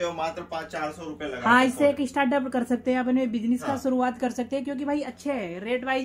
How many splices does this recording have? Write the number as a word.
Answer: zero